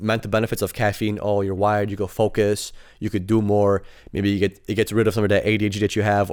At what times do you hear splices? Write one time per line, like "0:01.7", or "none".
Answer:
none